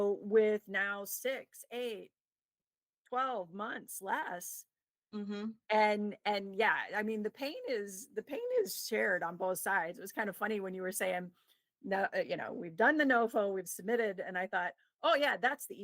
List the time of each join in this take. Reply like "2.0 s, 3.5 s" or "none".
10.0 s